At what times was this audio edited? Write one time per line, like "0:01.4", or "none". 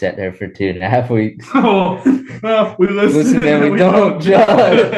none